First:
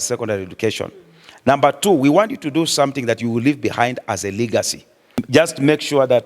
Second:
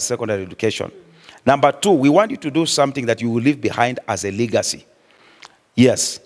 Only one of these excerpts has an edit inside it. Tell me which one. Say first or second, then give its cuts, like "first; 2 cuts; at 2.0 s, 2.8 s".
first; 1 cut; at 5.2 s